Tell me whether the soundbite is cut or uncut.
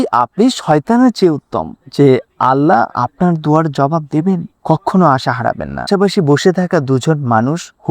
cut